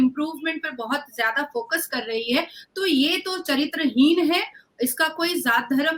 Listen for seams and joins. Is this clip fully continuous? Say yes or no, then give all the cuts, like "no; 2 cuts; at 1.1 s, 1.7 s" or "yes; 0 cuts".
yes; 0 cuts